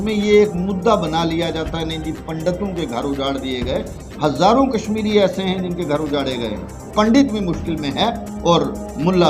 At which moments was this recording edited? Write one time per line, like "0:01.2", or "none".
0:06.8